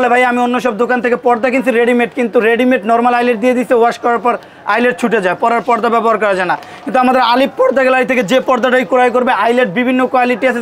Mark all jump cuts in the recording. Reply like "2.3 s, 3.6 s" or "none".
none